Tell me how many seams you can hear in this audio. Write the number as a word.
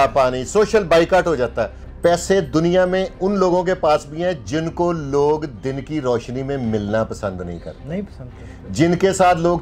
one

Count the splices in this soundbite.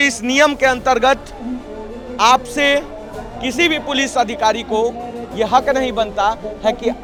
zero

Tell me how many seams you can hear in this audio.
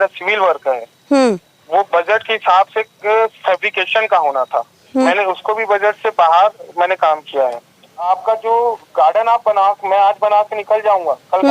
two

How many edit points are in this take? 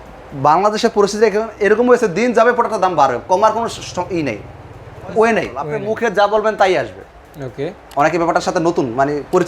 one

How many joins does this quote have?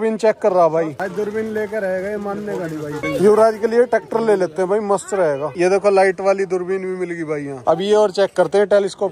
zero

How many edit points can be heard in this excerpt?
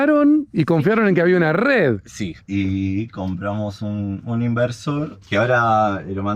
two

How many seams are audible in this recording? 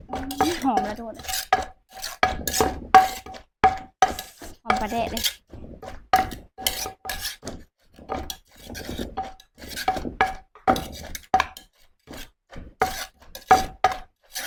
zero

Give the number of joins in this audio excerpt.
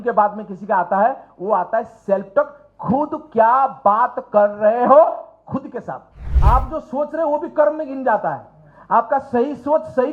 one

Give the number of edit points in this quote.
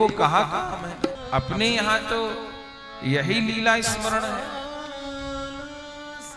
one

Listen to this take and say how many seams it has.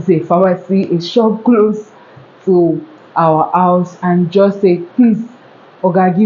zero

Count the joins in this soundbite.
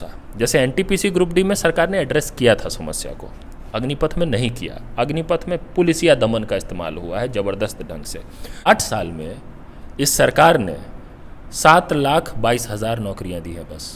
one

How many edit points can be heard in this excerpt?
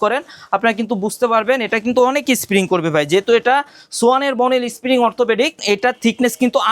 one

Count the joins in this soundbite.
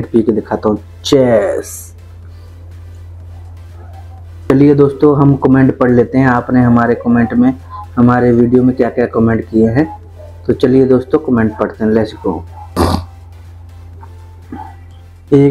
two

